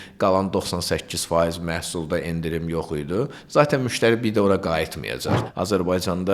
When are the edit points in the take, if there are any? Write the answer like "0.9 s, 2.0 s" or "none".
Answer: 5.4 s